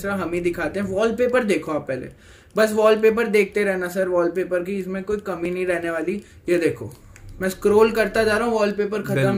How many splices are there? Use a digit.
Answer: 0